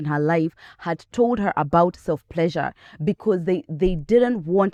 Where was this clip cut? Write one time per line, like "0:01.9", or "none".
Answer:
none